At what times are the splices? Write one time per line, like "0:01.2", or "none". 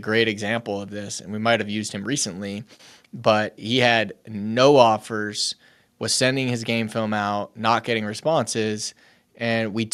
none